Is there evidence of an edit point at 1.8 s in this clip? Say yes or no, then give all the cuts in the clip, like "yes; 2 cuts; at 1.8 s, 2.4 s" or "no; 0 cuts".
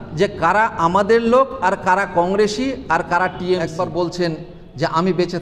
no; 1 cut; at 3.7 s